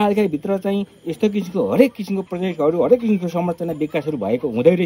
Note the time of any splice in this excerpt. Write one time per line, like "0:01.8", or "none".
none